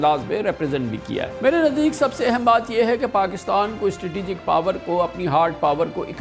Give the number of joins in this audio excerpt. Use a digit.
1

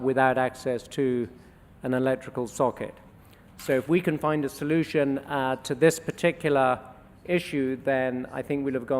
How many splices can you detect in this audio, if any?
1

